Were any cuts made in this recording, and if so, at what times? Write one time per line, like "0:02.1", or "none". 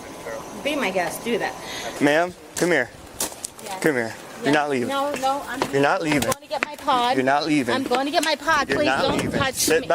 0:01.9